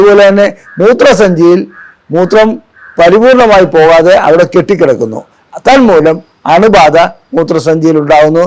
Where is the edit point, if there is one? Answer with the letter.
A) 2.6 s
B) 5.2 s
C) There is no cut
C